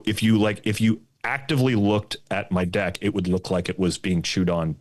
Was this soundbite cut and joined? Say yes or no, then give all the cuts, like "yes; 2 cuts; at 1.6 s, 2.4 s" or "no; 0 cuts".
no; 0 cuts